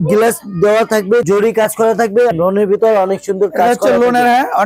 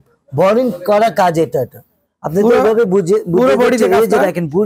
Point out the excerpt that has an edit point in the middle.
first; 2 cuts; at 1.2 s, 2.3 s

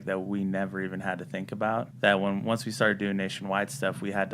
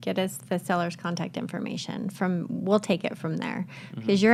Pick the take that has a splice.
first; 1 cut; at 1.9 s

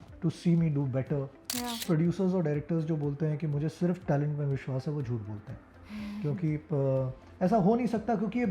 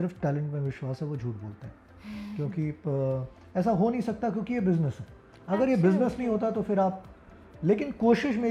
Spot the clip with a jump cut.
first; 1 cut; at 1.8 s

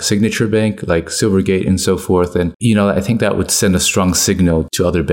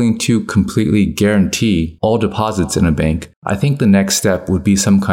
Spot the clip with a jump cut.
second; 1 cut; at 3.3 s

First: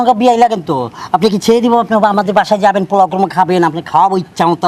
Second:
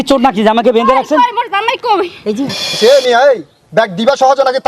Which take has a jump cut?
second; 1 cut; at 2.7 s

